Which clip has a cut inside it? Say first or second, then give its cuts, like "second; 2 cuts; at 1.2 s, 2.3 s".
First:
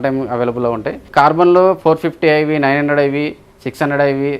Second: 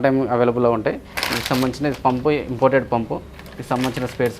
first; 1 cut; at 0.9 s